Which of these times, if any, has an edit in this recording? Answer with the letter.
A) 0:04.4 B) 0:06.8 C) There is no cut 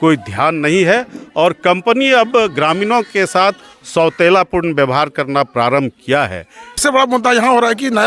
B